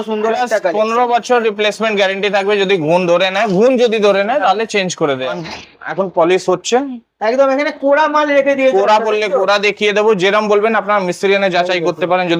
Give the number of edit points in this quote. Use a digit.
1